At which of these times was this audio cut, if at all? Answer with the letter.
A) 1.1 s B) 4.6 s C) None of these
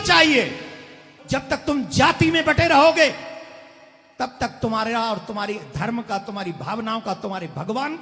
A